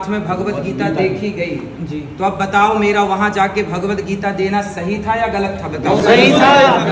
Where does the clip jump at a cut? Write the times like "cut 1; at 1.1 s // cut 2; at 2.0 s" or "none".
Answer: none